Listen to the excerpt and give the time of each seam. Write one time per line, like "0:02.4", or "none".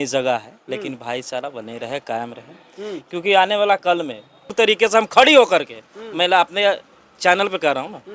0:04.5